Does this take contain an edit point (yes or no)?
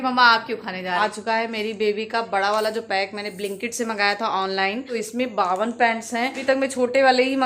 yes